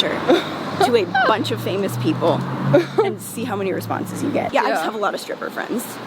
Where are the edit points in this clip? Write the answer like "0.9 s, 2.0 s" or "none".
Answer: 4.5 s